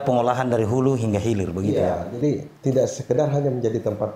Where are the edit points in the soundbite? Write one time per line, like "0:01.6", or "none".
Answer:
none